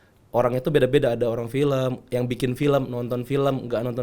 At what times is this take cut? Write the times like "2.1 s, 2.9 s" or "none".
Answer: none